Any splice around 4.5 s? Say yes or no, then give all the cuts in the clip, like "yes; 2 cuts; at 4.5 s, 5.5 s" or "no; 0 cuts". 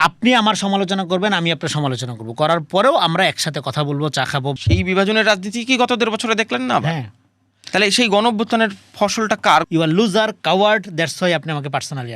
yes; 2 cuts; at 4.5 s, 9.6 s